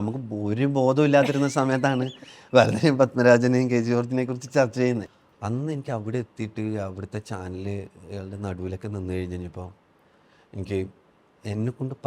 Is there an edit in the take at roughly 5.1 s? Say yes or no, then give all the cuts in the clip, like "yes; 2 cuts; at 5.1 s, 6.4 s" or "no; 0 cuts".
yes; 1 cut; at 5.1 s